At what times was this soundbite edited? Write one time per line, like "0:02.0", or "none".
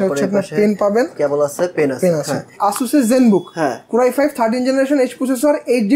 0:02.5